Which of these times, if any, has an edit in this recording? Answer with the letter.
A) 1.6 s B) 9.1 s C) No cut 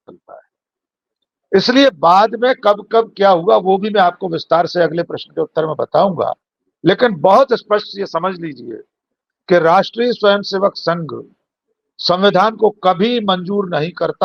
C